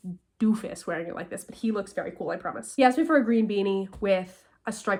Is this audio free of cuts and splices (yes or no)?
yes